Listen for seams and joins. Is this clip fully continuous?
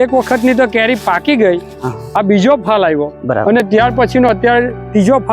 yes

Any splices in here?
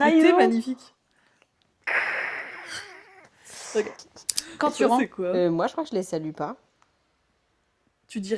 yes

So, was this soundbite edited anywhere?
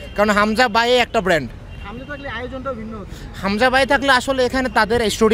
no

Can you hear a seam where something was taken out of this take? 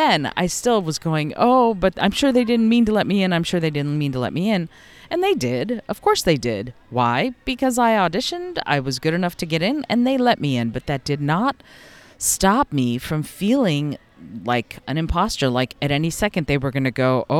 no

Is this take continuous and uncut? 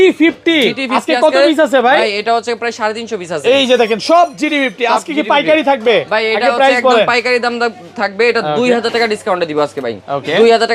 yes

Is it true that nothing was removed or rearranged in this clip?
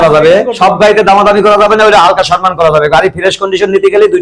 yes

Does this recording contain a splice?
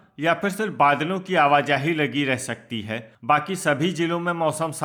no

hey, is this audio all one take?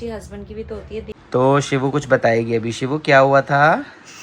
no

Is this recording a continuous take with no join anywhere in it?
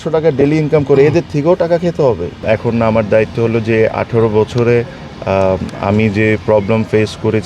no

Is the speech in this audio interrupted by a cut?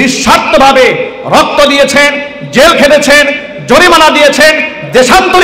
no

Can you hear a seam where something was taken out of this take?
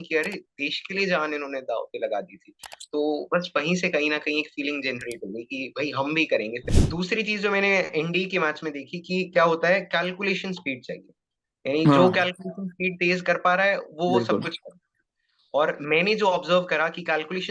yes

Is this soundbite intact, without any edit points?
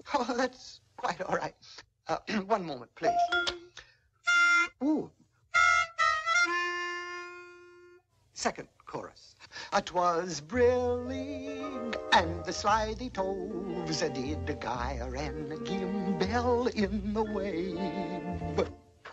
no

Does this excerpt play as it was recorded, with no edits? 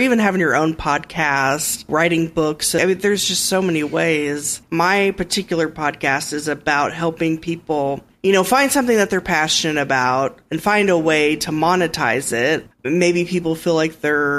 no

